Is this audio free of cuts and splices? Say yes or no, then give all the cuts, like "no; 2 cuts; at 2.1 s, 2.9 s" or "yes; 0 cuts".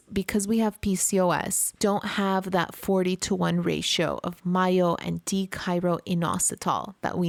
yes; 0 cuts